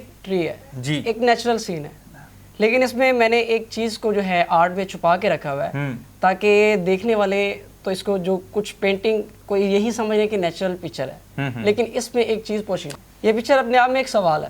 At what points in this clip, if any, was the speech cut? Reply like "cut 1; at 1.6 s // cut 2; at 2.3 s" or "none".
none